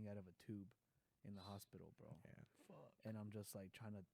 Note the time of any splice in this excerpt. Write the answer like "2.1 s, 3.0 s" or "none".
none

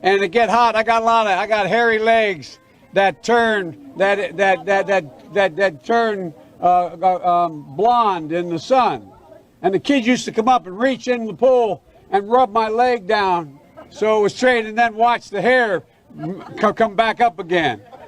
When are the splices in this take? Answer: none

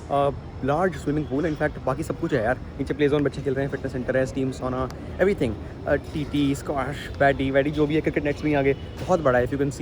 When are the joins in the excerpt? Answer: none

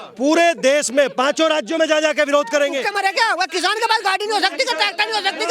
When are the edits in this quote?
2.9 s

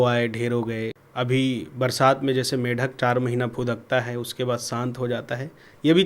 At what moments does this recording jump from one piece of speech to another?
1.0 s

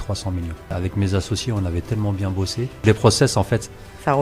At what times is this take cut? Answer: 0.7 s, 2.8 s

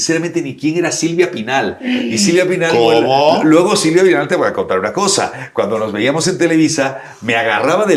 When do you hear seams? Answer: none

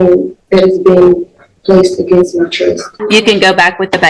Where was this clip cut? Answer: 2.9 s

